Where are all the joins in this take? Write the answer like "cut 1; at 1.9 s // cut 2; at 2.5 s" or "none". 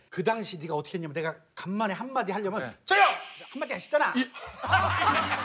none